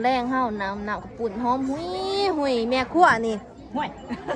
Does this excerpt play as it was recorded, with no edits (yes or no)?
yes